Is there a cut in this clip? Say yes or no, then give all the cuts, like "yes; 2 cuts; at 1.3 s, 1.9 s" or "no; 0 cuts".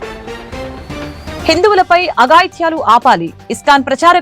no; 0 cuts